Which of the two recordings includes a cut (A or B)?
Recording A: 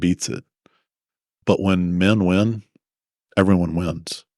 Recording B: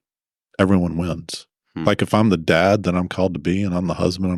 A